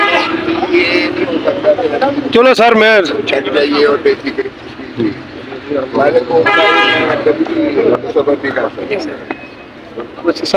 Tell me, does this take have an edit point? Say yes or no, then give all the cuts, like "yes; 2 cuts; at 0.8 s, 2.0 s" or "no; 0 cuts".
no; 0 cuts